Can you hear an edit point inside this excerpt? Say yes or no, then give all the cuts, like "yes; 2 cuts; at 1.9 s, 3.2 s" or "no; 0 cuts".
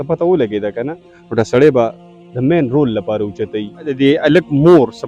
yes; 1 cut; at 4.0 s